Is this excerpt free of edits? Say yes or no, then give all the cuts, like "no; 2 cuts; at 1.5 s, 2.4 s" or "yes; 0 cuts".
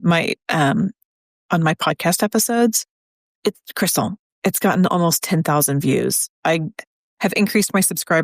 no; 1 cut; at 6.3 s